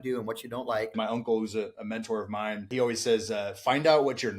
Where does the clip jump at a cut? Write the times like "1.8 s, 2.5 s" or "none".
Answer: 1.0 s, 2.7 s

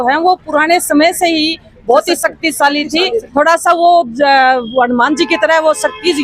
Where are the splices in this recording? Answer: 3.2 s

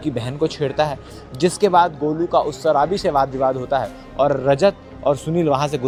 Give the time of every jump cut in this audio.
none

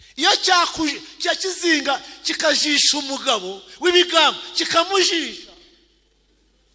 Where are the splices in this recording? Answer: none

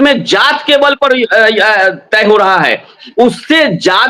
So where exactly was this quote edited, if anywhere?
3.0 s

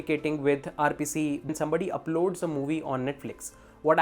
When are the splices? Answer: 1.5 s

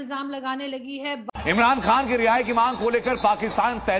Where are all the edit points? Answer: 1.2 s

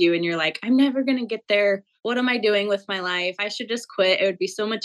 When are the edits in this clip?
none

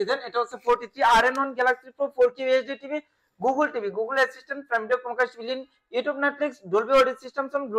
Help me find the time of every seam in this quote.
none

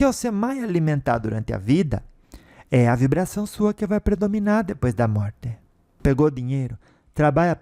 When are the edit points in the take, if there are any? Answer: 6.0 s

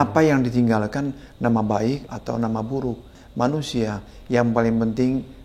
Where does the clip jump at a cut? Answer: 2.1 s, 3.2 s

